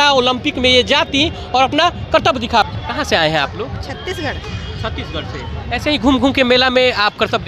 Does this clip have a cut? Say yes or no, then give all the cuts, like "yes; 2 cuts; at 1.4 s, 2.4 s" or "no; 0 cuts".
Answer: yes; 1 cut; at 2.7 s